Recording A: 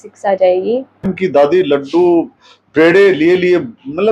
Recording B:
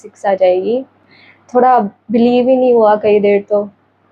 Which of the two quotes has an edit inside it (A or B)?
A